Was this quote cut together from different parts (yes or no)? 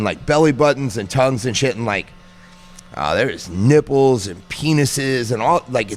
no